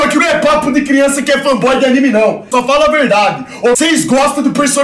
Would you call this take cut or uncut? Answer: cut